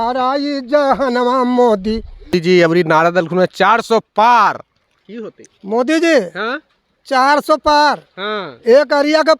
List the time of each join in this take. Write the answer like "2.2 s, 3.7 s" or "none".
2.3 s